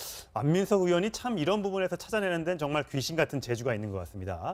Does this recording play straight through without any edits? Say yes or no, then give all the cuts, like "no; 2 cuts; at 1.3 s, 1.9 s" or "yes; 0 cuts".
yes; 0 cuts